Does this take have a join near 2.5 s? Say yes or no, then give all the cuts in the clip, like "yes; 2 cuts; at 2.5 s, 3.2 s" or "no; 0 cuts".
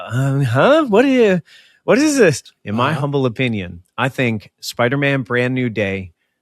yes; 1 cut; at 2.5 s